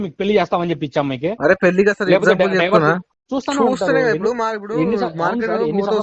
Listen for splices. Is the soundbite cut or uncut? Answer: cut